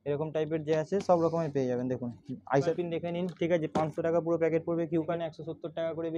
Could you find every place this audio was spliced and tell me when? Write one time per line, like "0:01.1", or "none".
0:02.7
0:05.2